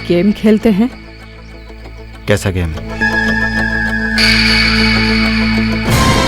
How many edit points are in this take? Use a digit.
1